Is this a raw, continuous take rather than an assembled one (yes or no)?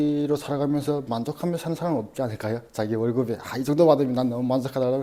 yes